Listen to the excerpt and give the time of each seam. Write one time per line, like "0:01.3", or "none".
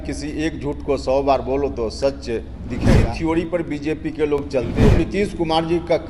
0:02.9
0:04.8